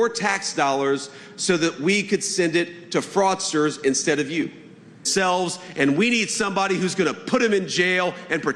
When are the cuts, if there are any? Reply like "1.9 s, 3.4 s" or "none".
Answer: 5.1 s